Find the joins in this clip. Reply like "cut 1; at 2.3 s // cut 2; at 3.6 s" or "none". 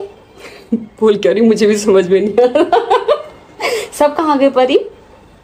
none

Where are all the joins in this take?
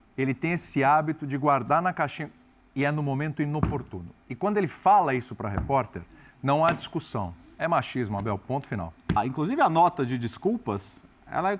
cut 1; at 9.2 s

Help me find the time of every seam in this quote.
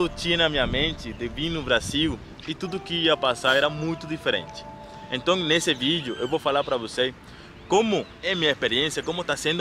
cut 1; at 8.1 s

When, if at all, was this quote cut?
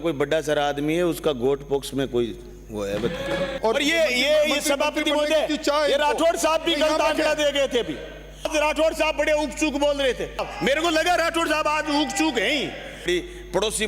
cut 1; at 3.5 s // cut 2; at 8.5 s // cut 3; at 10.5 s // cut 4; at 13.1 s

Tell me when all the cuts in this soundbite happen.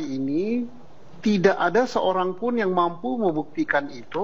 none

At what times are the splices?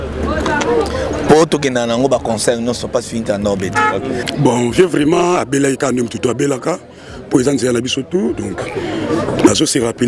cut 1; at 4.2 s

